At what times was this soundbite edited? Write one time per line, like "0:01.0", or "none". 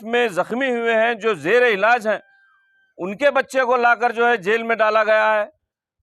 none